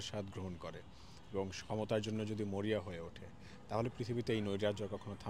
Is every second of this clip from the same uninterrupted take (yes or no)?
yes